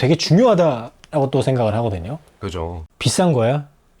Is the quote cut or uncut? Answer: cut